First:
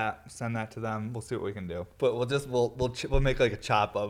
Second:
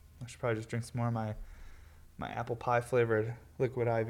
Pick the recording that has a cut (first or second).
first